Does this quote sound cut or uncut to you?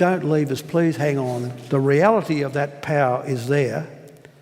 cut